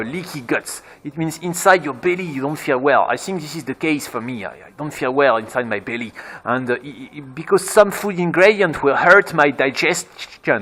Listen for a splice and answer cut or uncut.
uncut